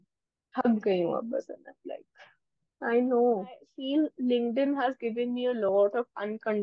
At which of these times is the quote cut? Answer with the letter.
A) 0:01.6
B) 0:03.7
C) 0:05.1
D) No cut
B